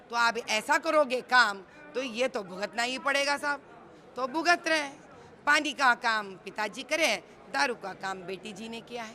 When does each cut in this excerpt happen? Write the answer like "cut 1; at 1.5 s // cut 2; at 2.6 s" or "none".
none